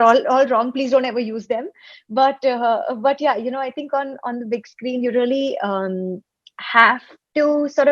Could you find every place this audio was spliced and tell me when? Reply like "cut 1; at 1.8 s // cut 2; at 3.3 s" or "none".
none